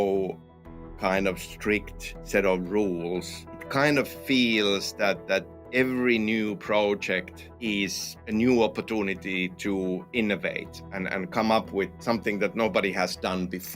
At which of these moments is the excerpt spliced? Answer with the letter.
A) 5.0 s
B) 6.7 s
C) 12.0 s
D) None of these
C